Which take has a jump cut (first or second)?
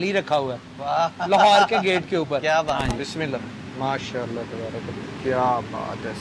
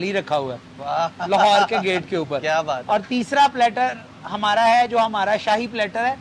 first